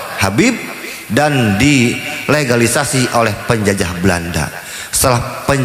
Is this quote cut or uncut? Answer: uncut